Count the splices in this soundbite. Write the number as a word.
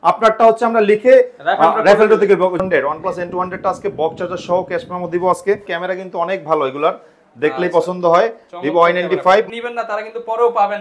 three